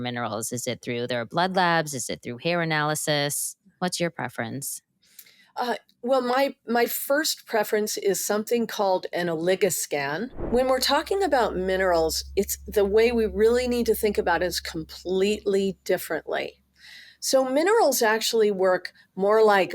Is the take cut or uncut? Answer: cut